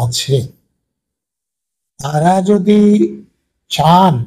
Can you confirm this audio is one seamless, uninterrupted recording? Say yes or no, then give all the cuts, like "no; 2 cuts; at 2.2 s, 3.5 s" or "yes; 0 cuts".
yes; 0 cuts